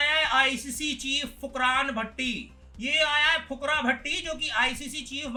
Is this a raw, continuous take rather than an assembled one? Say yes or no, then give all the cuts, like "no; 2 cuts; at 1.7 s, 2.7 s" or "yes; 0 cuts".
yes; 0 cuts